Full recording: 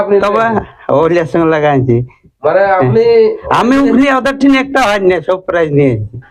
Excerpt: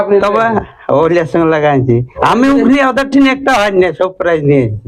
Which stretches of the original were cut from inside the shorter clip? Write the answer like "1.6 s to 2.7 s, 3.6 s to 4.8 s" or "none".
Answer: 2.1 s to 3.4 s